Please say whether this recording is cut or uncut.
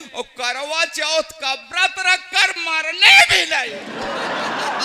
cut